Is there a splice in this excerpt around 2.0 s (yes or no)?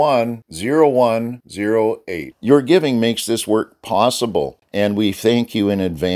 no